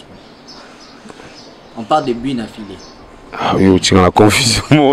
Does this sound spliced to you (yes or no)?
no